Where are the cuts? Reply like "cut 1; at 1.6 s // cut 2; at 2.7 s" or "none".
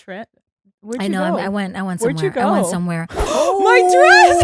cut 1; at 3.2 s